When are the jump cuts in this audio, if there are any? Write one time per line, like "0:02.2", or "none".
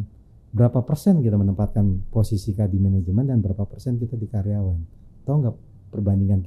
none